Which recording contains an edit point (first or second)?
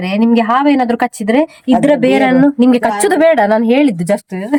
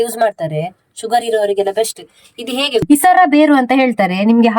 second